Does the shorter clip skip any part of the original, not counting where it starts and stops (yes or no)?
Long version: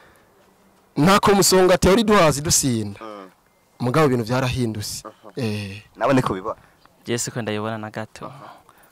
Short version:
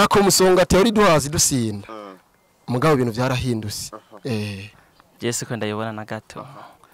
yes